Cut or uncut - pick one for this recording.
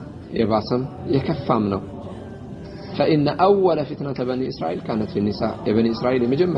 cut